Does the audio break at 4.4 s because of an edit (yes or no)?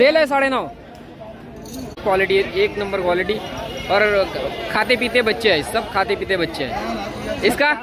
no